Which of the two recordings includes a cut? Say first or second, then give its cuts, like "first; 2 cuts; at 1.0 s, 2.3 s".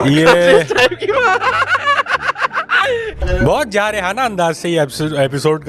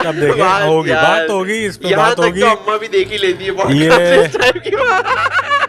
first; 1 cut; at 3.1 s